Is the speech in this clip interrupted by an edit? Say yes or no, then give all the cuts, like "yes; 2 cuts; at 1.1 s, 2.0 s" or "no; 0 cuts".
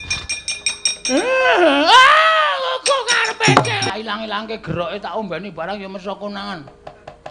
yes; 1 cut; at 3.9 s